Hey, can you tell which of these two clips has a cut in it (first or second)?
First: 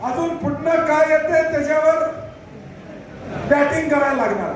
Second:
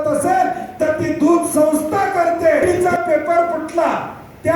second